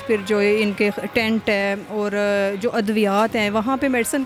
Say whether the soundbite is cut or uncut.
uncut